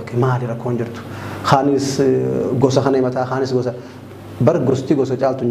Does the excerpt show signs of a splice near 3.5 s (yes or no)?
no